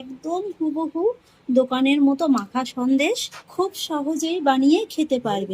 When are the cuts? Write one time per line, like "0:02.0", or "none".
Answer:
0:03.4

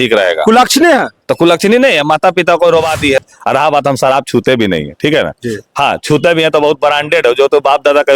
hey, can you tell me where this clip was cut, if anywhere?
0:03.2

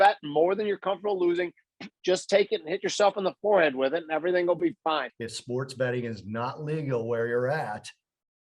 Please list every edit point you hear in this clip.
0:05.2

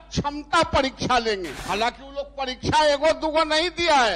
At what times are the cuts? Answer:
0:01.5

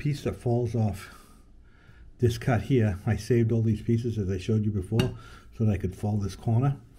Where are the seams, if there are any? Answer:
none

